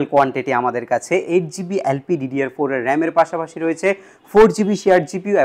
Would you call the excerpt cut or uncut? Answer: uncut